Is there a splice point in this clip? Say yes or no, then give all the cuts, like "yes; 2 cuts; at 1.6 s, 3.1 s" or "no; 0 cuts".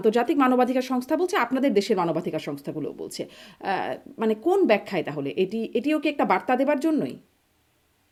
no; 0 cuts